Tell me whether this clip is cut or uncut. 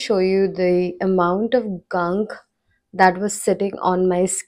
uncut